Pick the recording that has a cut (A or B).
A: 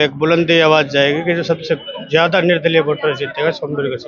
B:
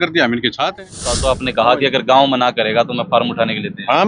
B